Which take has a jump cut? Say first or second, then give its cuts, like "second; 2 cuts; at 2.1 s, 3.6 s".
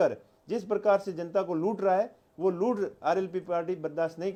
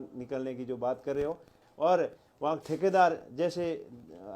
second; 1 cut; at 1.6 s